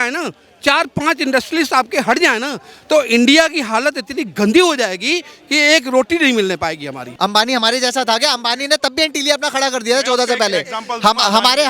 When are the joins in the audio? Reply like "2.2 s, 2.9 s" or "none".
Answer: 7.0 s